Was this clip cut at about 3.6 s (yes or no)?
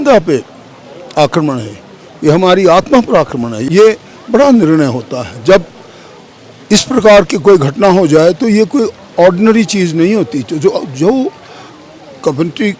yes